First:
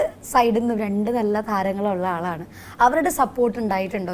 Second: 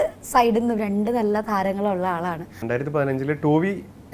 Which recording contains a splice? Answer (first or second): second